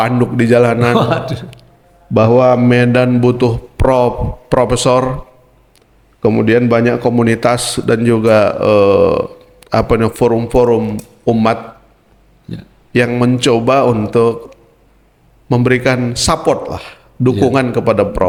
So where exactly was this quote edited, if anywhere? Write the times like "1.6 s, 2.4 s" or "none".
none